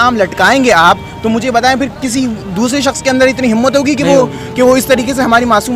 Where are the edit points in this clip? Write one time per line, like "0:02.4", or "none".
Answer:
none